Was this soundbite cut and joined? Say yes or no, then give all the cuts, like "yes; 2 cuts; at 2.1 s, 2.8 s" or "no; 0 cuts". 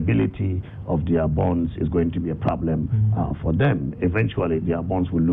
no; 0 cuts